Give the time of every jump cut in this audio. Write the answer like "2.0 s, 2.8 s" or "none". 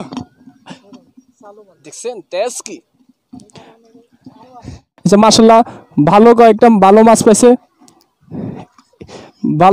4.9 s